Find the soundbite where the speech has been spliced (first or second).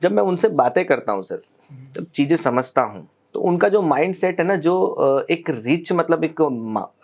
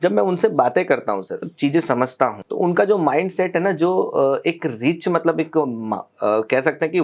second